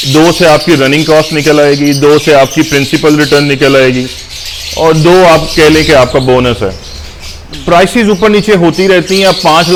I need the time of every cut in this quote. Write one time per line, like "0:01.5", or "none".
none